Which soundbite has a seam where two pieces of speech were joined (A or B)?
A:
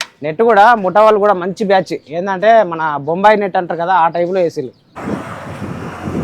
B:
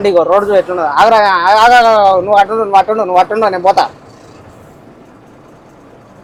A